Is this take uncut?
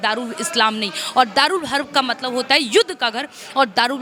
yes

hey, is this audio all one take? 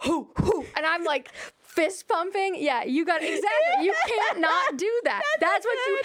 yes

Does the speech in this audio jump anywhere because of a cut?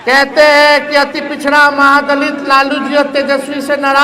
no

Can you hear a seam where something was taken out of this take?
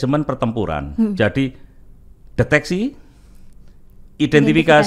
no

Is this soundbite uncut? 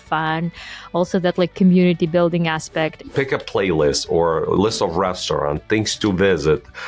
no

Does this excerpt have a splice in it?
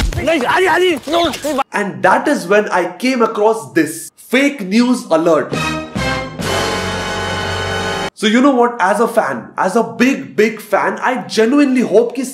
yes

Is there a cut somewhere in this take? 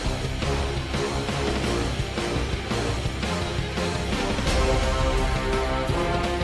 no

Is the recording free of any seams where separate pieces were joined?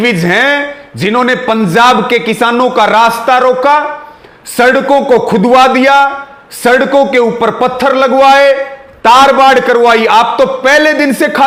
yes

